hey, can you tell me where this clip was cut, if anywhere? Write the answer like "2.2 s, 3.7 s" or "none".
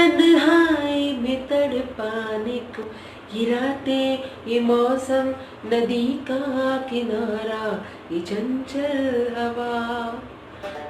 2.8 s